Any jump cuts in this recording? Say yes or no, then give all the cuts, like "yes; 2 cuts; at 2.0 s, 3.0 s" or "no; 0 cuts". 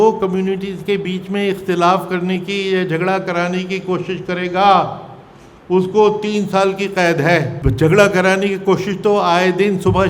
yes; 1 cut; at 7.6 s